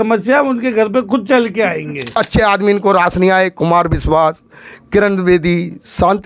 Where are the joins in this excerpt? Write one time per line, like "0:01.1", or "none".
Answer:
0:02.2